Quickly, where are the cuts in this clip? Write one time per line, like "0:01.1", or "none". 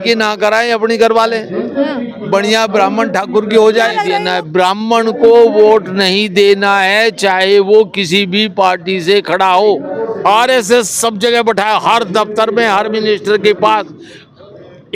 0:04.1
0:09.9